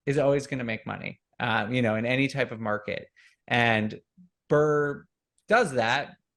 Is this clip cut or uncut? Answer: uncut